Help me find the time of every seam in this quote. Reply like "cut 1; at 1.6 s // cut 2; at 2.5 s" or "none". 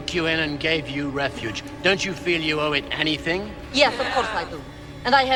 none